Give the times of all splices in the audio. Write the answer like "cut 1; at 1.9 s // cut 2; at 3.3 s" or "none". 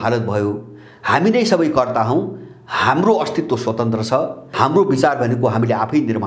cut 1; at 4.5 s